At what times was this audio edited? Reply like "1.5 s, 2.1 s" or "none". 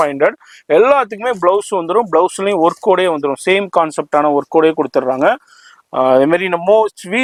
none